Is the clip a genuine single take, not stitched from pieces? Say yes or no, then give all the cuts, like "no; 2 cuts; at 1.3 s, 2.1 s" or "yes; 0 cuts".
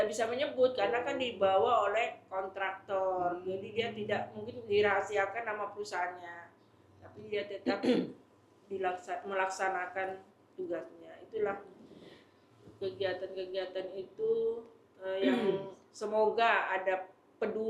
yes; 0 cuts